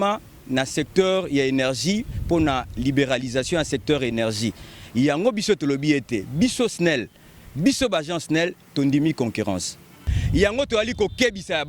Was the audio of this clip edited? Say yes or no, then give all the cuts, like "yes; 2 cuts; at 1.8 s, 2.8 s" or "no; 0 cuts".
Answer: yes; 1 cut; at 10.1 s